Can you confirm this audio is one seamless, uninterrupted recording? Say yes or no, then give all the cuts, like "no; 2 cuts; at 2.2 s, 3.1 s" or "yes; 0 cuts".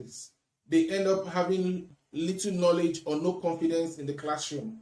no; 1 cut; at 2.0 s